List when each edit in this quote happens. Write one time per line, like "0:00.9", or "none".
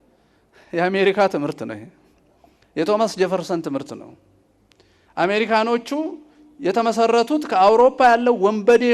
none